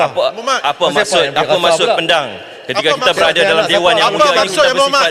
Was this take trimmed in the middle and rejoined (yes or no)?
no